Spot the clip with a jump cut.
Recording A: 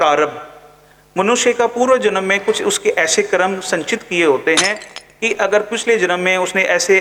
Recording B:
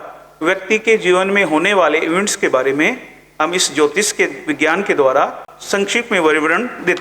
B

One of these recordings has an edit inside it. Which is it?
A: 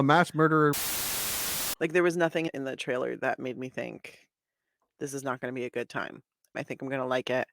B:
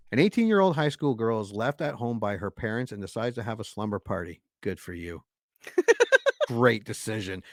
A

